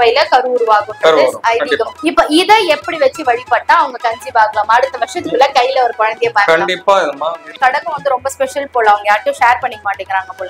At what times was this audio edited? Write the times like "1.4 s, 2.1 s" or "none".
7.5 s